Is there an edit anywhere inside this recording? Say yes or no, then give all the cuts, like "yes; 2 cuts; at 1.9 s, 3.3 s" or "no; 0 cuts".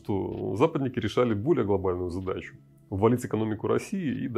no; 0 cuts